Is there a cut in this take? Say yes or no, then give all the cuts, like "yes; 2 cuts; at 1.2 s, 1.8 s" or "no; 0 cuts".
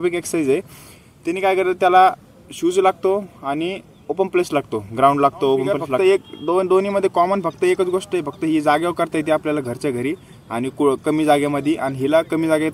yes; 1 cut; at 6.0 s